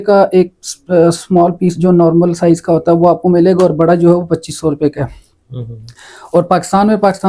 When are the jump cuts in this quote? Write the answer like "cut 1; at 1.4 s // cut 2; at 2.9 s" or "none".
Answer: none